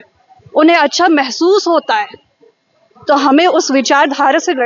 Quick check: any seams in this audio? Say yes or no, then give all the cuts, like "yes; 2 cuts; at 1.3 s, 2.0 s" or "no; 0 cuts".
no; 0 cuts